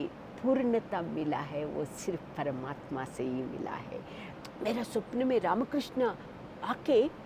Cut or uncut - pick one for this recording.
cut